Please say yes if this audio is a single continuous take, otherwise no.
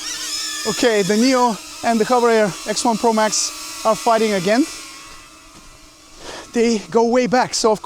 yes